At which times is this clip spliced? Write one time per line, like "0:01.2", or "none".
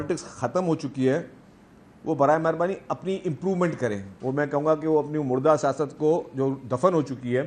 0:04.1